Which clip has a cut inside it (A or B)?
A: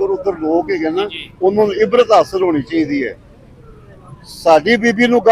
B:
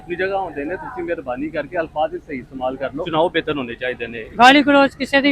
B